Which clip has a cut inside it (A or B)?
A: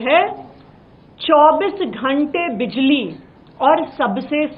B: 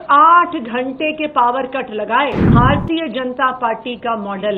B